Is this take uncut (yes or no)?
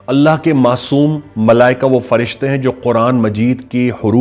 yes